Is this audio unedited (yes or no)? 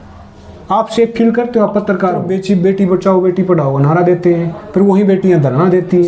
no